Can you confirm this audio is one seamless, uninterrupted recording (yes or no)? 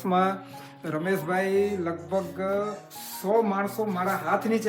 yes